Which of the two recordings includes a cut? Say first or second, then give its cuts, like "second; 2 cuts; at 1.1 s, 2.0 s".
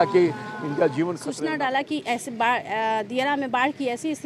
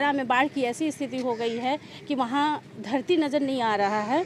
first; 1 cut; at 1.3 s